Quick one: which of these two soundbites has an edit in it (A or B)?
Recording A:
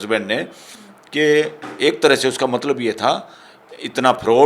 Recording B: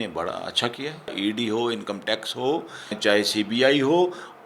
B